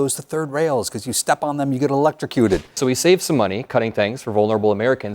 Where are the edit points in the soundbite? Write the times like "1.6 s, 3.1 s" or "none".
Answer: 2.8 s